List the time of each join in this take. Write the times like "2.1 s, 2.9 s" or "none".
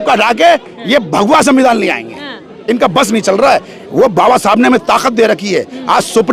none